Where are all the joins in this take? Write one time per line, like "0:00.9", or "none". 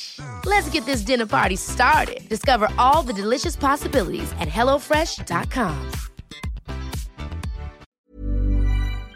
0:08.1